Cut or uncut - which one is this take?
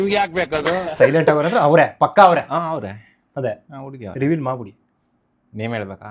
cut